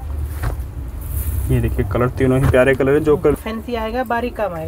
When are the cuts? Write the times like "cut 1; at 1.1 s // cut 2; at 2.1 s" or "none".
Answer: cut 1; at 3.3 s